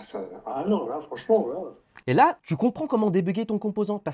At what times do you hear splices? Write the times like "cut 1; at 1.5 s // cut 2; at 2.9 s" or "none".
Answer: cut 1; at 2.4 s